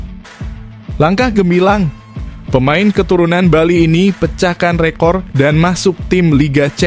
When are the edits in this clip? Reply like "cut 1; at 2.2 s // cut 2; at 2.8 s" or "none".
cut 1; at 0.9 s